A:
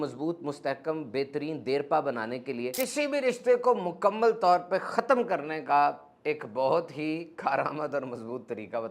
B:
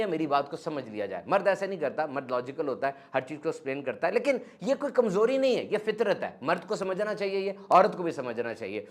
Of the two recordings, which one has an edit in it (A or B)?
A